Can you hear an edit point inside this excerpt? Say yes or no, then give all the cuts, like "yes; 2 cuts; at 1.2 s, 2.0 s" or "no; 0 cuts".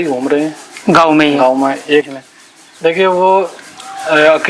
yes; 1 cut; at 2.1 s